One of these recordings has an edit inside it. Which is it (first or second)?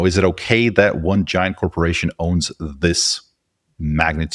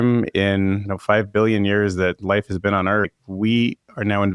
second